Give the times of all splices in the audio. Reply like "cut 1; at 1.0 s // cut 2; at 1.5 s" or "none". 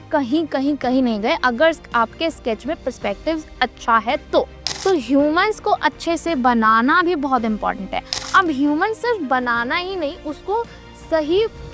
cut 1; at 4.6 s